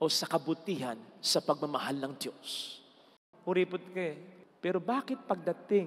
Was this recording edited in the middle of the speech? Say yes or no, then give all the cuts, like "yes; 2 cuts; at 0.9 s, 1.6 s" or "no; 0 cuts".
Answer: yes; 1 cut; at 3.3 s